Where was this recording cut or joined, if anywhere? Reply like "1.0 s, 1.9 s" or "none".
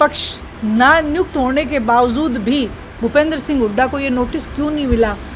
none